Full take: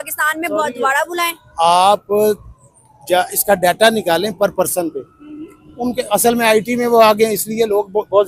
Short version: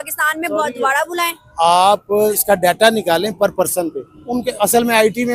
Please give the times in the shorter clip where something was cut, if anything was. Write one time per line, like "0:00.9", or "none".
0:02.4
0:04.1